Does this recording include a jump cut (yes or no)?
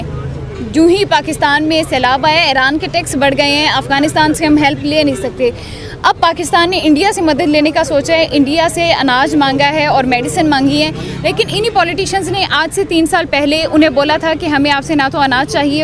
no